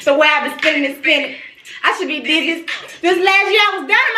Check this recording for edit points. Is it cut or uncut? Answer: uncut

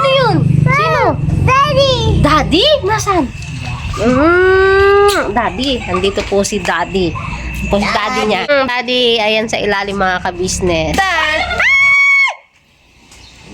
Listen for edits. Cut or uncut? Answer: cut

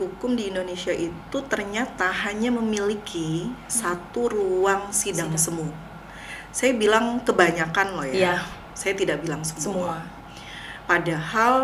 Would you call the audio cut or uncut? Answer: uncut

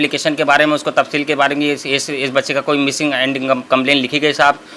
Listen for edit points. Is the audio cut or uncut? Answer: uncut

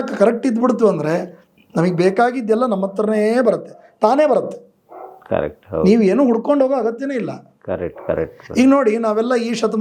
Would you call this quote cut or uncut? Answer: uncut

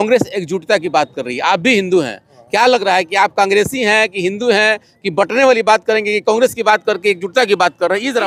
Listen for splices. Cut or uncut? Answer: uncut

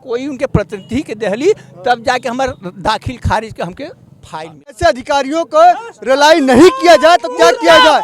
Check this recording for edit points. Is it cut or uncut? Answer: cut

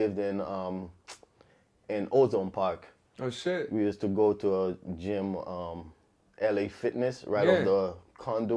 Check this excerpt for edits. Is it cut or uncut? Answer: uncut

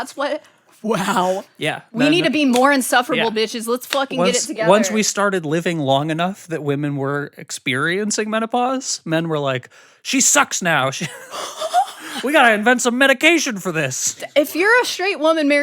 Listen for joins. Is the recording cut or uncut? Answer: cut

